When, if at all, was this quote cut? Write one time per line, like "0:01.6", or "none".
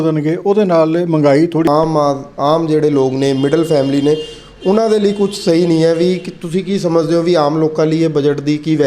0:01.7